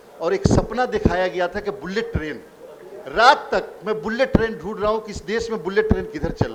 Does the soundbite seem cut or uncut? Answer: uncut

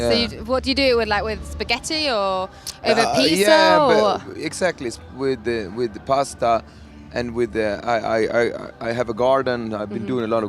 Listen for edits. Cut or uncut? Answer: cut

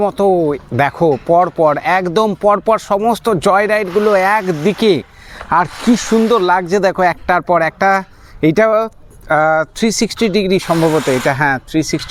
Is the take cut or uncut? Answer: uncut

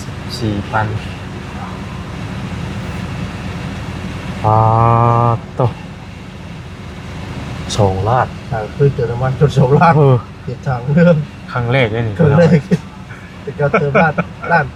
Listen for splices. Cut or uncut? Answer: uncut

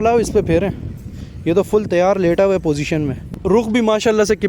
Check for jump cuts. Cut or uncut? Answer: cut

